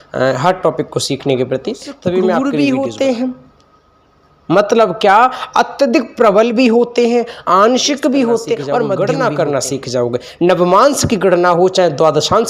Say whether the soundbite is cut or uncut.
cut